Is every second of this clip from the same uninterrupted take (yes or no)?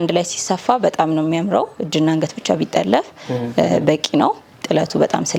yes